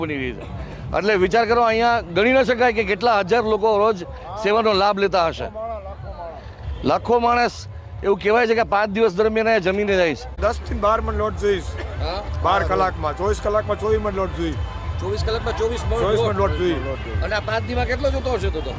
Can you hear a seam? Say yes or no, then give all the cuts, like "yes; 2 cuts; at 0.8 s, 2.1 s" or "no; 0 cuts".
yes; 1 cut; at 10.3 s